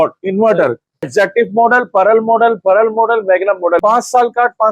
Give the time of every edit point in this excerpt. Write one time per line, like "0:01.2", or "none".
0:01.1
0:03.8